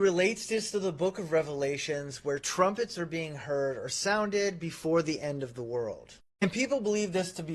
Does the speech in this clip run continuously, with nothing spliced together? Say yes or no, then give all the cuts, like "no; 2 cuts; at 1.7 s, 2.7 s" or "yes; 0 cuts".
yes; 0 cuts